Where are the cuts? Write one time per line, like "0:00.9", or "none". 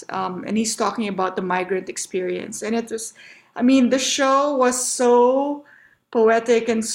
none